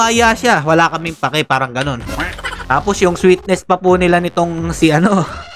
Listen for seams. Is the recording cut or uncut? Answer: cut